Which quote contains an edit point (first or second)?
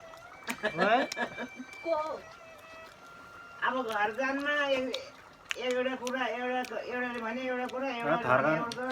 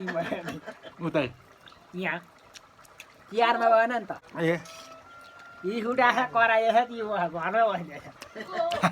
second